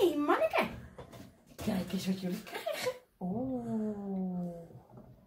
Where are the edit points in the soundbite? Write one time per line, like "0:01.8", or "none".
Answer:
none